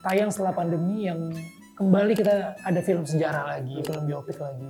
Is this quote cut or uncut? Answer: uncut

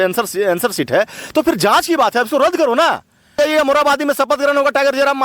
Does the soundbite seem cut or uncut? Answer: cut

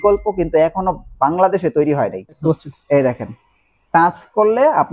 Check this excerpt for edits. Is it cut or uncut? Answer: cut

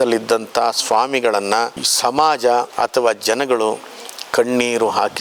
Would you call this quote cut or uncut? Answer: cut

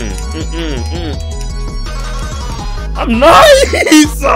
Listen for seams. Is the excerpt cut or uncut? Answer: uncut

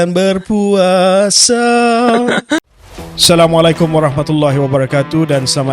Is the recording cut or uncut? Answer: cut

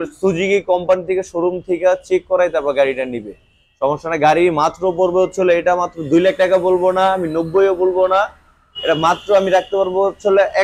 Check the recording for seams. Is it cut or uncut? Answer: uncut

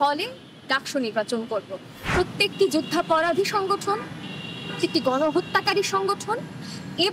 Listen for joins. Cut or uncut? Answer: cut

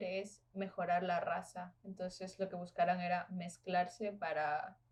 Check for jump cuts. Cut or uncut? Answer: uncut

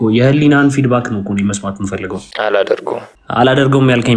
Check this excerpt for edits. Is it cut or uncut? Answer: cut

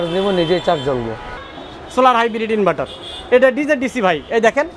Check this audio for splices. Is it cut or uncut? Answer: cut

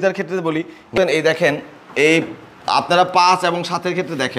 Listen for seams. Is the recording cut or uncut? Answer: cut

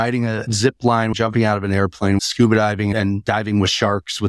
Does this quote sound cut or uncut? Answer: cut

